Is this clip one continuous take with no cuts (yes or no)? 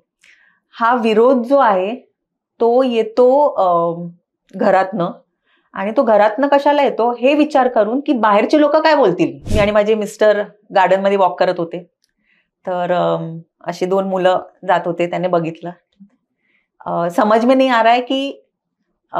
no